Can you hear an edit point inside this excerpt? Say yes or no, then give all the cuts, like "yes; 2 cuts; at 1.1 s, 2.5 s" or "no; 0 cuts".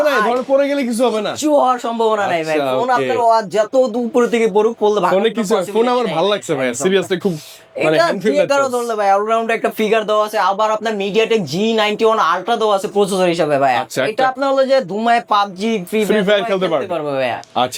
no; 0 cuts